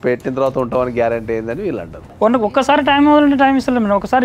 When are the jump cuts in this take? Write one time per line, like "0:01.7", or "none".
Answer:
0:02.1